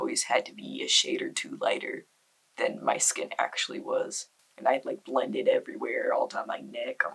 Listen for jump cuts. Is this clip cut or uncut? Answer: uncut